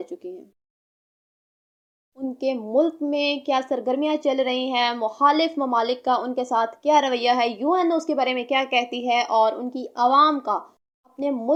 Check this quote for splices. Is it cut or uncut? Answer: uncut